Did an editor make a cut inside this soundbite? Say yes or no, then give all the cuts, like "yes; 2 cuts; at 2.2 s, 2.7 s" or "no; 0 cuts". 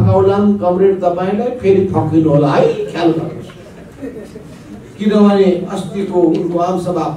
no; 0 cuts